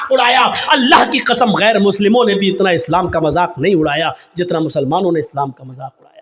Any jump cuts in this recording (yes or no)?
no